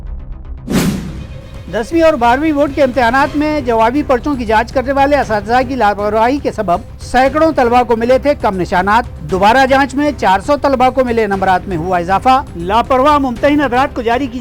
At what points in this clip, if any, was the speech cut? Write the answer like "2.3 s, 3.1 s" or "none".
1.1 s